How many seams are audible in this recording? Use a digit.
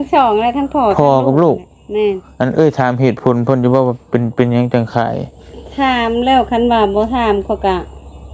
0